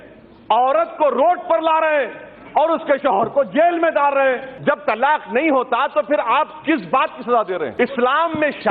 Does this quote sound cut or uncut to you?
cut